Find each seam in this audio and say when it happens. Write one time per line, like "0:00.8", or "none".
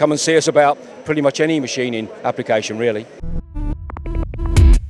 0:03.5